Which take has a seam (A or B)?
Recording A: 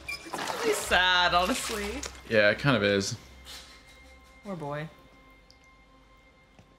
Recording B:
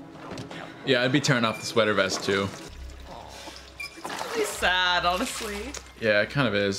B